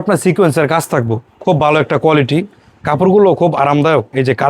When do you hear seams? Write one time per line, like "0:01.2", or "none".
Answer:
0:01.2